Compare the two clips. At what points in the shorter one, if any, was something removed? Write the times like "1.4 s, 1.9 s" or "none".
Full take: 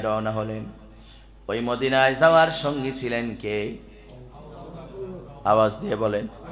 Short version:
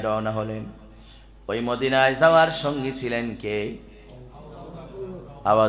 none